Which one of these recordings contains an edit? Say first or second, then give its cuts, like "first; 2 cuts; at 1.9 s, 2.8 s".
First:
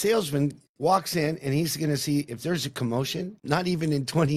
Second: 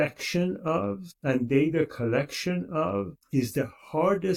first; 1 cut; at 3.4 s